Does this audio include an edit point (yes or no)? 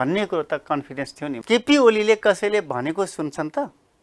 yes